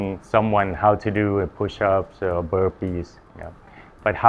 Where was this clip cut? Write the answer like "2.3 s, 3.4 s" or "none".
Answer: none